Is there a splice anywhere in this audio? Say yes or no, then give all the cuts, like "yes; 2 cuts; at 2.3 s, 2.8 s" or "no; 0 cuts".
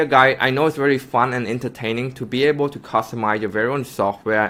no; 0 cuts